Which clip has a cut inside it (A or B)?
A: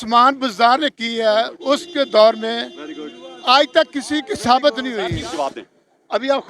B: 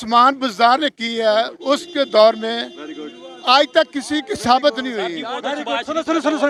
A